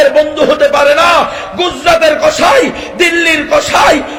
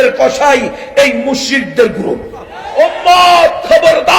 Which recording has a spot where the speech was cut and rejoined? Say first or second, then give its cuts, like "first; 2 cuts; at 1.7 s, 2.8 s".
second; 1 cut; at 2.6 s